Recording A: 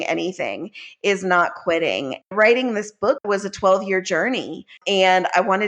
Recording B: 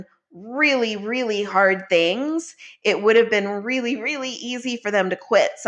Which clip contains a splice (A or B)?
A